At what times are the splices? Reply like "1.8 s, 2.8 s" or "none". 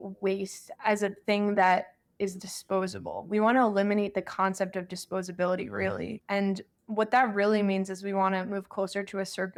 none